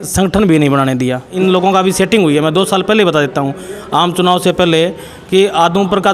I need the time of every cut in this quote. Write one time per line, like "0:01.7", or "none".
0:01.3